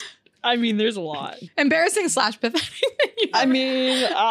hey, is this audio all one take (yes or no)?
no